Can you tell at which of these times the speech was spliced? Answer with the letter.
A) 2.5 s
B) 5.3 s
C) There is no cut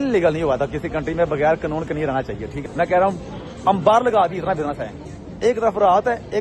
A